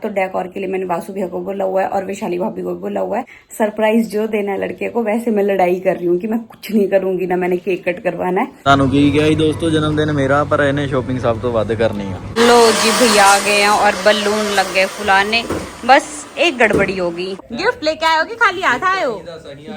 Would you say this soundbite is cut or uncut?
cut